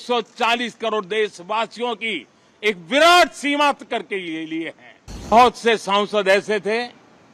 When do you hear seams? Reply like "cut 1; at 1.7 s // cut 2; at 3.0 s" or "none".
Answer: cut 1; at 5.3 s